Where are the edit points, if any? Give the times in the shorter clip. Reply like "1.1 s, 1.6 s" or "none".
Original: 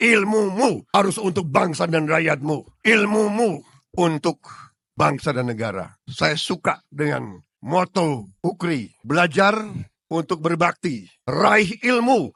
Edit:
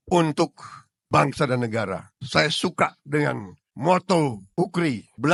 none